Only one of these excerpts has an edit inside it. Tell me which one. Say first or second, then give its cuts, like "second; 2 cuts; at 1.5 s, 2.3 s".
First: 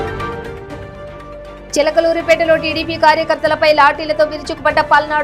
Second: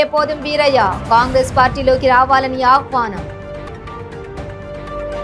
first; 1 cut; at 1.2 s